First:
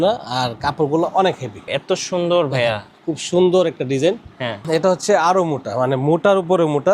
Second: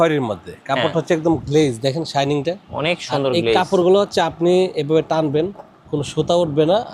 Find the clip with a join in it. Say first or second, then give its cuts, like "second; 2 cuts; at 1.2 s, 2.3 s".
first; 2 cuts; at 1.7 s, 4.6 s